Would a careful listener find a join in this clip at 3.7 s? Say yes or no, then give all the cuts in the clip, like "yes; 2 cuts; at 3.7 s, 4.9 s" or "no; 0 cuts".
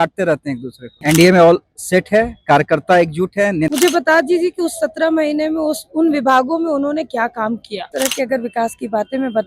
yes; 3 cuts; at 0.9 s, 3.7 s, 7.9 s